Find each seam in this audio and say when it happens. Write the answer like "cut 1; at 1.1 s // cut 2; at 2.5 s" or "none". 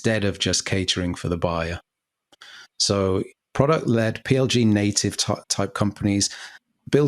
none